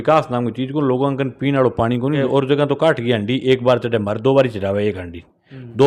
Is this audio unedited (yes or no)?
no